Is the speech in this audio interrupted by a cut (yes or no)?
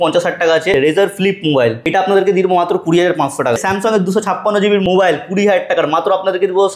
yes